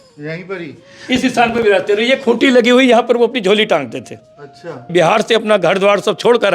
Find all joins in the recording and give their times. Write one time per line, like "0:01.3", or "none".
0:04.8